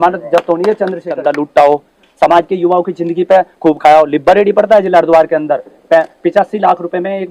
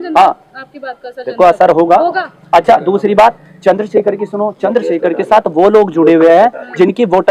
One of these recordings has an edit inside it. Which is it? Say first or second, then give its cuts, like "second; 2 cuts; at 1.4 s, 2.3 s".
first; 1 cut; at 1.1 s